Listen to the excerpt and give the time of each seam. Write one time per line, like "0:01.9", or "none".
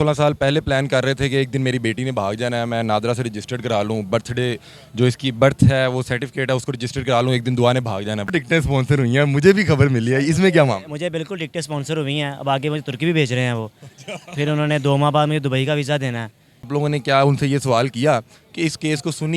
0:08.3
0:16.7